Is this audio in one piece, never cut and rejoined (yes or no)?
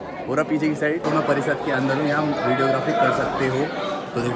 no